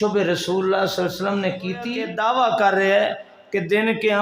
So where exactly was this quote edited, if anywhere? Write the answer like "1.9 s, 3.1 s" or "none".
2.0 s